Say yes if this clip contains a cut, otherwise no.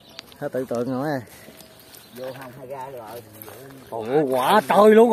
no